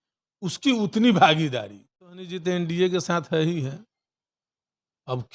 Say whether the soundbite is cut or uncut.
cut